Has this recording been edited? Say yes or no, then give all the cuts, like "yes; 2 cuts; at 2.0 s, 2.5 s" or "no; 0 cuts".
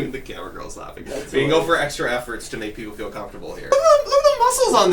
yes; 1 cut; at 3.7 s